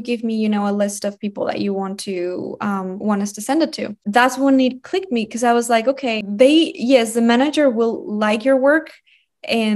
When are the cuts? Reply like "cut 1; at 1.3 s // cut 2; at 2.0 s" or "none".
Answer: cut 1; at 4.0 s // cut 2; at 6.3 s